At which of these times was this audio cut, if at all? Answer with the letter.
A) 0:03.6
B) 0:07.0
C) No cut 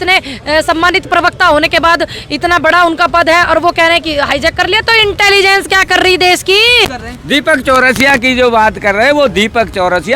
B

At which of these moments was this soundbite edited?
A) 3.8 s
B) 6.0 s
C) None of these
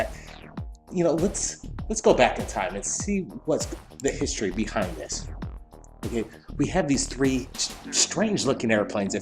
B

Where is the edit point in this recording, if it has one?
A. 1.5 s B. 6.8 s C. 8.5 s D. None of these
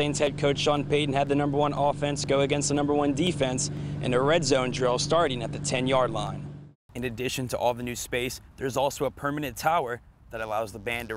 B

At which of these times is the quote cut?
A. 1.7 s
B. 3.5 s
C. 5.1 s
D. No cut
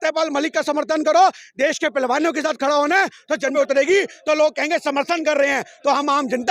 B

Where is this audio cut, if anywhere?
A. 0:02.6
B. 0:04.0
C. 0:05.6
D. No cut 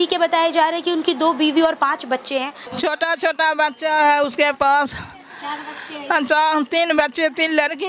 A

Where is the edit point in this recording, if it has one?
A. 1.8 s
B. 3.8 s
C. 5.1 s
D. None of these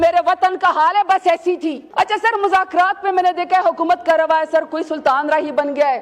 A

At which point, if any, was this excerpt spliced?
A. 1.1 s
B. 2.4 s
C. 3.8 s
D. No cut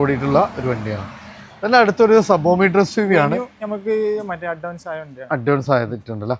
D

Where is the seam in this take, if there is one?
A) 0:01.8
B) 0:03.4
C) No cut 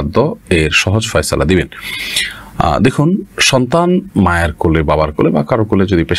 C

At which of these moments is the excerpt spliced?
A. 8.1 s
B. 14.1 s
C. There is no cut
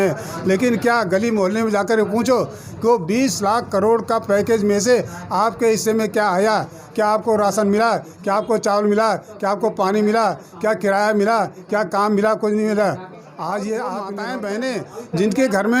B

